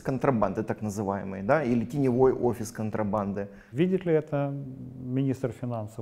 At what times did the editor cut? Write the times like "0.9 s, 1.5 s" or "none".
3.6 s